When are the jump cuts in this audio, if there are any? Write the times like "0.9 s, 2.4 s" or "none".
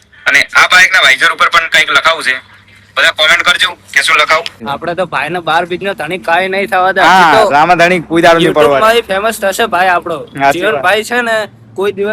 4.6 s